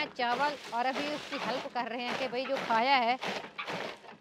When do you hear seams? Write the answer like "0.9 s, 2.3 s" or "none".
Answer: none